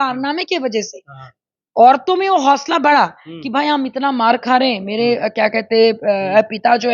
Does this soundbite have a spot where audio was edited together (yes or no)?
no